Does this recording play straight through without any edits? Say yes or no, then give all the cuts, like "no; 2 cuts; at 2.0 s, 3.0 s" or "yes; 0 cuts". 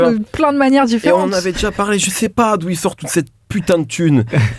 yes; 0 cuts